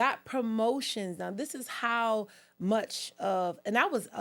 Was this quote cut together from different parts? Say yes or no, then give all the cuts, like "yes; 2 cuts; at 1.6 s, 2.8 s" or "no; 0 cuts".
no; 0 cuts